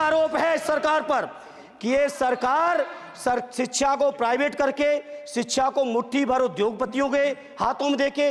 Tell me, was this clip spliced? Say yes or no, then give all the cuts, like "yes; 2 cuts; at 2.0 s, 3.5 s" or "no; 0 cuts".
no; 0 cuts